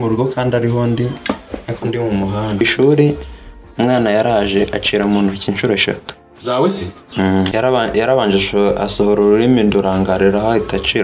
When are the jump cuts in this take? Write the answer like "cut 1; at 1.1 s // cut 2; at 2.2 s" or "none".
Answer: cut 1; at 2.6 s // cut 2; at 7.5 s